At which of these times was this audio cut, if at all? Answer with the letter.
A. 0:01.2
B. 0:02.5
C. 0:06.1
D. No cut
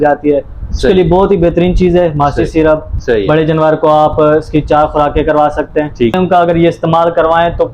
C